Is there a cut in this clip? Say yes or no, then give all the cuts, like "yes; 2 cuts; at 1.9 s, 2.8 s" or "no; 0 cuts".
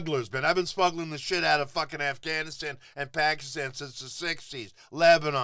no; 0 cuts